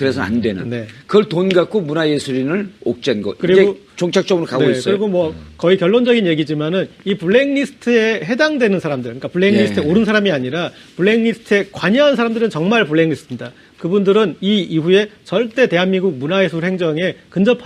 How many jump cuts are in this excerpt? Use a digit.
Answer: 1